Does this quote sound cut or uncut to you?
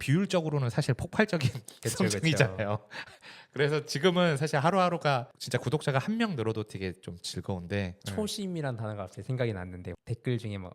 cut